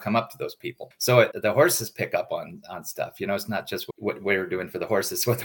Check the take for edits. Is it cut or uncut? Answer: uncut